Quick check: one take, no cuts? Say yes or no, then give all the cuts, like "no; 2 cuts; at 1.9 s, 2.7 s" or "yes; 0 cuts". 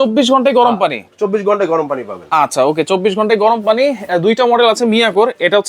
yes; 0 cuts